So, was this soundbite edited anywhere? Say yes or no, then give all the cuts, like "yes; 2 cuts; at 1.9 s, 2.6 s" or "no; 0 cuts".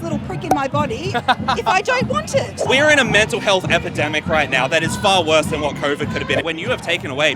yes; 2 cuts; at 2.5 s, 6.4 s